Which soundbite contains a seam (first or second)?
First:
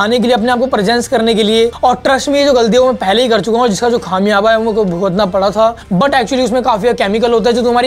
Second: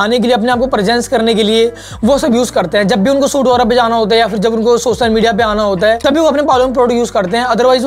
first